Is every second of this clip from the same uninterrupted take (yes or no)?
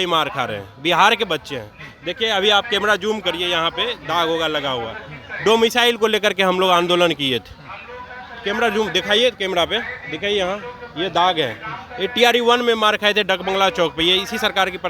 yes